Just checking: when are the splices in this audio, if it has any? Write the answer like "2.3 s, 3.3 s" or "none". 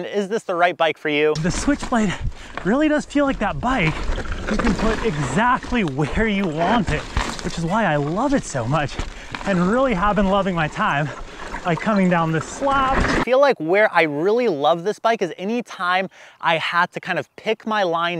1.3 s, 13.2 s